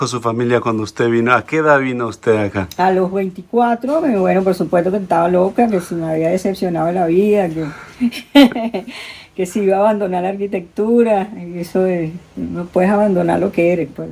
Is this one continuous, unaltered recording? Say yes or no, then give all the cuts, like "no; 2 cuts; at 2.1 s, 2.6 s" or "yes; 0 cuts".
yes; 0 cuts